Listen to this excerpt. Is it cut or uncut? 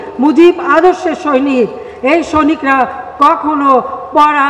uncut